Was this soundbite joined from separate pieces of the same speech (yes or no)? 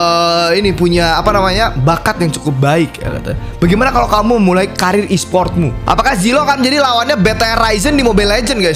yes